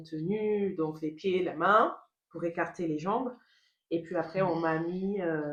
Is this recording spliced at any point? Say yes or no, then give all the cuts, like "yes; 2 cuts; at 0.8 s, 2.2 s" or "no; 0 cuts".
no; 0 cuts